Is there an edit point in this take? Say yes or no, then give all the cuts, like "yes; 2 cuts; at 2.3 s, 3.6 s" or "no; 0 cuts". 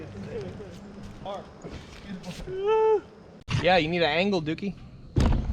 yes; 2 cuts; at 1.3 s, 3.6 s